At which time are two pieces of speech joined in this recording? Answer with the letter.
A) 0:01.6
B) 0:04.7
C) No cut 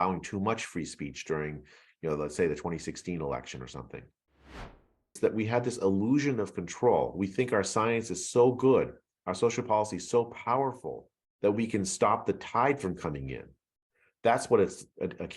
B